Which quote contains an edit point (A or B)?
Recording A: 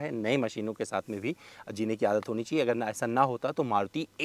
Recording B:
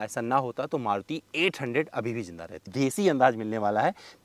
B